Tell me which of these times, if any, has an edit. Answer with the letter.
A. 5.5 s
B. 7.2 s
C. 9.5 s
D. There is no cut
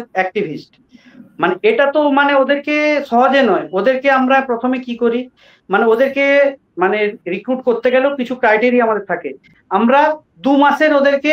C